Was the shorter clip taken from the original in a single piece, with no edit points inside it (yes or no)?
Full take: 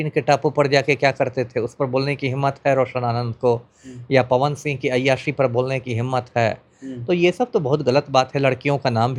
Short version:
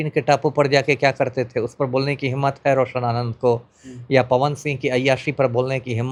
yes